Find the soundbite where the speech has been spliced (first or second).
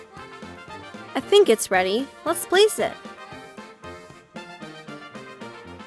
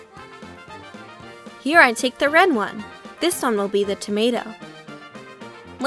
second